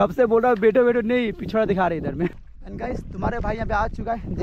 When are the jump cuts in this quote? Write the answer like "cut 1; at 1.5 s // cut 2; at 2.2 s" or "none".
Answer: cut 1; at 2.3 s